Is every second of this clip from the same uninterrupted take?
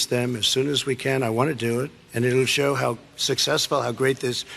yes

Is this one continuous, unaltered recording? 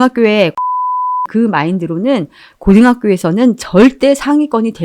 no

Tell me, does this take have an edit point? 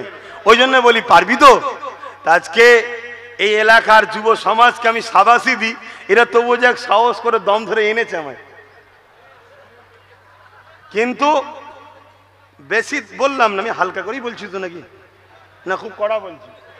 no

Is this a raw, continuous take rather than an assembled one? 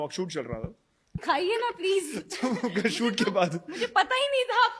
no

